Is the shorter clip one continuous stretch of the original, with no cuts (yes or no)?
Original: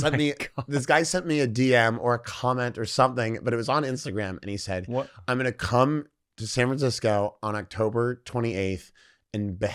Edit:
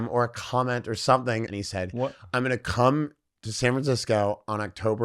no